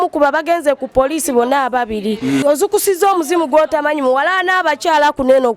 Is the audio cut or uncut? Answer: cut